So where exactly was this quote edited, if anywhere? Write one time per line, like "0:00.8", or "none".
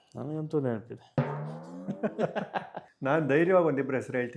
0:02.8